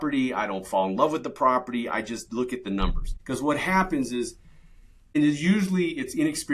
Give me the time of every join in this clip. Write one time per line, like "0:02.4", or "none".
0:03.1
0:05.2